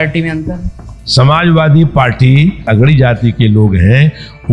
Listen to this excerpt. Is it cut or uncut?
cut